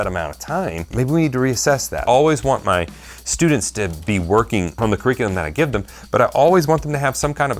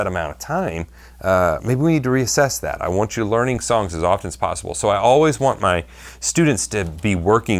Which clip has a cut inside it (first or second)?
first